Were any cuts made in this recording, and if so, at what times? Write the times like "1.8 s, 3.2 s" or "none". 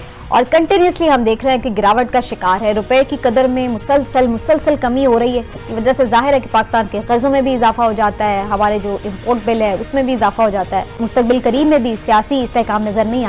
none

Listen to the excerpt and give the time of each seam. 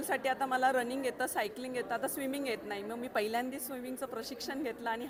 none

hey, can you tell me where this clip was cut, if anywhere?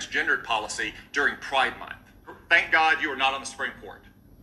2.3 s

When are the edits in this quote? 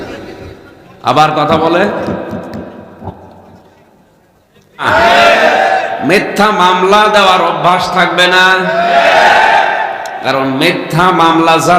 4.9 s

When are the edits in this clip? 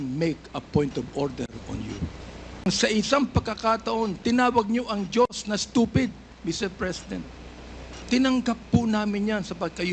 2.6 s

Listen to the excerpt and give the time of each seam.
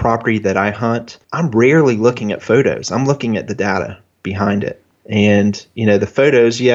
1.2 s

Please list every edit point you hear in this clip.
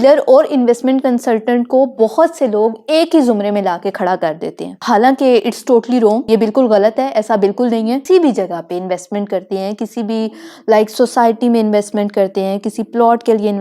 4.8 s, 6.2 s, 8.0 s

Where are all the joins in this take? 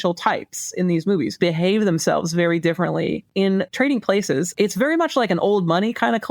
1.4 s, 3.4 s, 4.5 s

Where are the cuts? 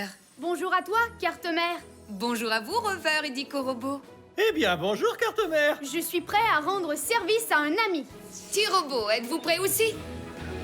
9.7 s

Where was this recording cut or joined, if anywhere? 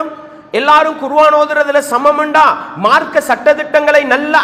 none

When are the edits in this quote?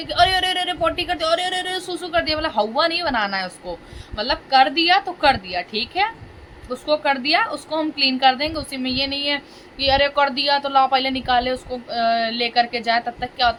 none

